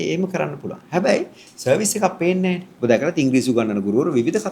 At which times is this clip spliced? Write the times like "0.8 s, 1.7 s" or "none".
2.7 s